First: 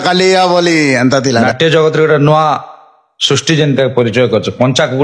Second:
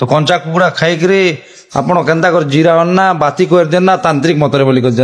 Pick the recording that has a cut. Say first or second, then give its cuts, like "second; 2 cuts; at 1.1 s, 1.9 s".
first; 1 cut; at 1.4 s